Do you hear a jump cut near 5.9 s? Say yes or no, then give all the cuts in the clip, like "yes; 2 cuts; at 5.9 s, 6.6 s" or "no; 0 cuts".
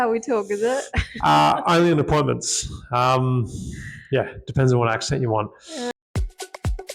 yes; 1 cut; at 5.9 s